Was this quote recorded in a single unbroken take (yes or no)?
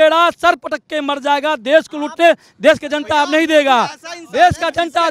yes